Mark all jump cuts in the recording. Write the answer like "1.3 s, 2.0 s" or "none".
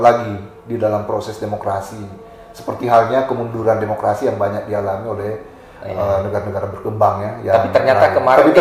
none